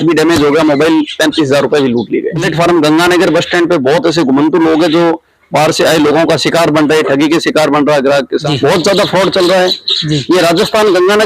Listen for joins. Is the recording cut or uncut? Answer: cut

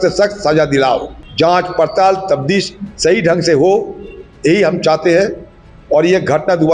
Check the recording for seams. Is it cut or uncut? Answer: cut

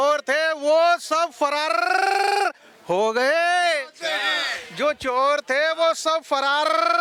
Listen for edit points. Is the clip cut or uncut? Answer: uncut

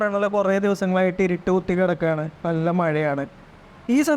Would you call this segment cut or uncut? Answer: uncut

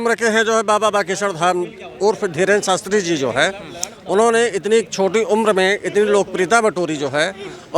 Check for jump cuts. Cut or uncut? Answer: uncut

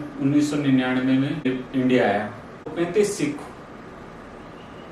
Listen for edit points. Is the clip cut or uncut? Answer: cut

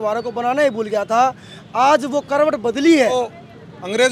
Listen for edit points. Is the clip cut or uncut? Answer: cut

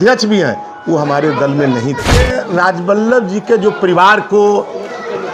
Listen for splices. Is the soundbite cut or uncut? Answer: cut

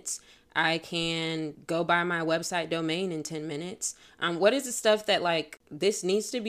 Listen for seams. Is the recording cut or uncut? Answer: cut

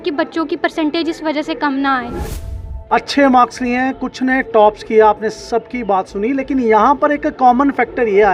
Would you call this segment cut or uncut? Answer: cut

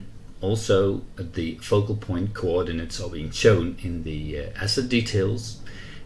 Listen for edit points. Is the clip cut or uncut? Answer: uncut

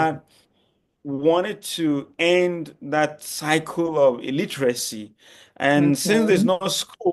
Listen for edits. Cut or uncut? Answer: uncut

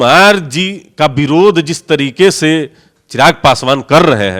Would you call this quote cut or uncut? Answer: uncut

